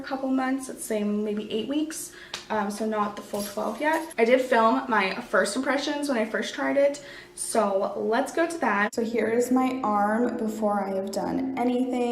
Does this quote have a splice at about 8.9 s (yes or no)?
yes